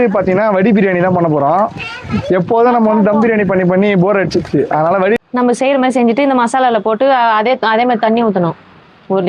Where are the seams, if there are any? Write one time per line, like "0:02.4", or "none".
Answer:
0:05.2